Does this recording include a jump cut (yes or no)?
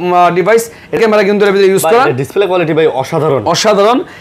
yes